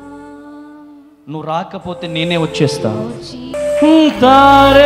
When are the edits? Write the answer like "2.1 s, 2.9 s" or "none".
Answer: 3.5 s